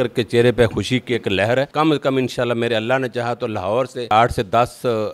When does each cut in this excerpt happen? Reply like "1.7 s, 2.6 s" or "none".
1.7 s, 4.1 s